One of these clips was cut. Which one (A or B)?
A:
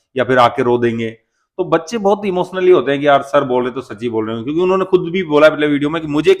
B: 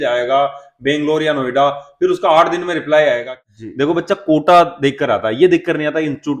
B